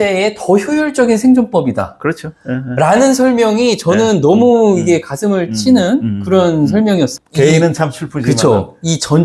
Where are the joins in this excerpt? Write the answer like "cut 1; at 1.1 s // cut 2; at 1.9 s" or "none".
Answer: none